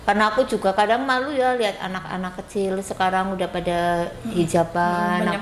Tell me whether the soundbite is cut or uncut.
uncut